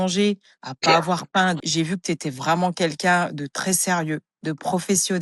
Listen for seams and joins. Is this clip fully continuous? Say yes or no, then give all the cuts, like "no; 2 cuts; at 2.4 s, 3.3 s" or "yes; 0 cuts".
no; 1 cut; at 1.6 s